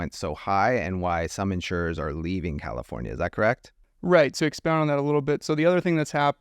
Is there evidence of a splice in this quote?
yes; 1 cut; at 4.3 s

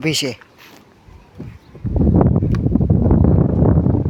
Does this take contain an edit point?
no; 0 cuts

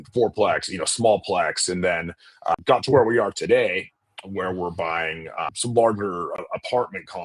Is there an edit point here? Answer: yes; 3 cuts; at 2.5 s, 5.5 s, 6.4 s

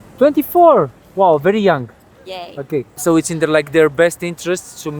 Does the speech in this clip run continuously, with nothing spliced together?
no; 1 cut; at 2.9 s

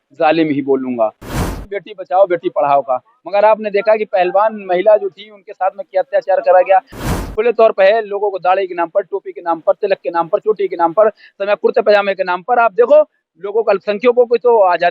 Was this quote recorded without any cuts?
no; 2 cuts; at 1.5 s, 7.1 s

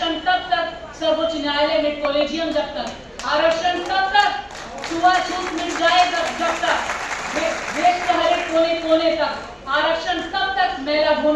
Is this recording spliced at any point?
no; 0 cuts

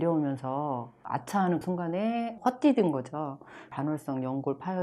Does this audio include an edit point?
yes; 2 cuts; at 1.6 s, 3.7 s

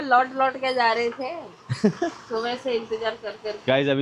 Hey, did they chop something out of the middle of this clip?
no; 0 cuts

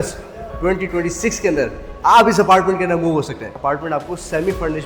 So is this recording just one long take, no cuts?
no; 1 cut; at 3.5 s

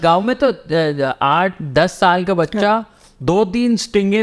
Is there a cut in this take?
no; 0 cuts

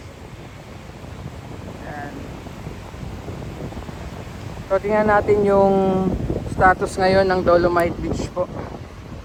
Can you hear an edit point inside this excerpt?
no; 0 cuts

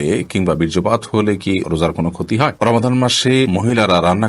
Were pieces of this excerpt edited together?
yes; 2 cuts; at 2.6 s, 3.5 s

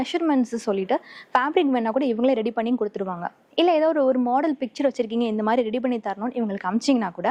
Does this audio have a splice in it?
no; 0 cuts

